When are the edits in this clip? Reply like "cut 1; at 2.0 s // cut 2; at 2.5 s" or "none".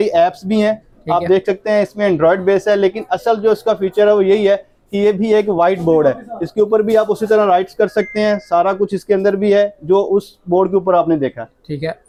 none